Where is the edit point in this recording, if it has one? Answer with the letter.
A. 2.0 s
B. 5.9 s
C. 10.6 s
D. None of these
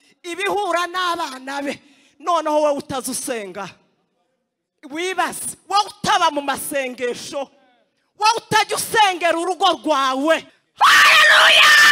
C